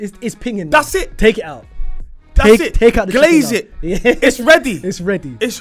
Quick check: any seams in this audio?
no; 0 cuts

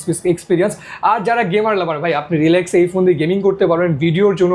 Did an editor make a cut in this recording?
no; 0 cuts

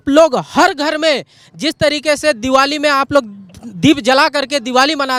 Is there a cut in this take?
no; 0 cuts

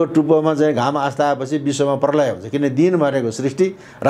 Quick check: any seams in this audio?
no; 0 cuts

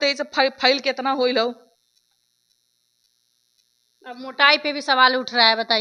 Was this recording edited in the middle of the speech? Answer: no; 0 cuts

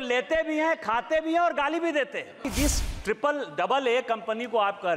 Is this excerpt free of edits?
no; 1 cut; at 2.5 s

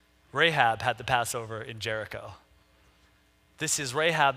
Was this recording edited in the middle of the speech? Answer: no; 0 cuts

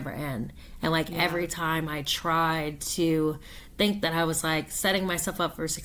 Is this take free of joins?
yes; 0 cuts

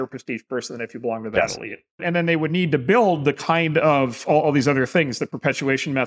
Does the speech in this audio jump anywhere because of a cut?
no; 0 cuts

